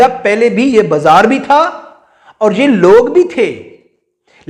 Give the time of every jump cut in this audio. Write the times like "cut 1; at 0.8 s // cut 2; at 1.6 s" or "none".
none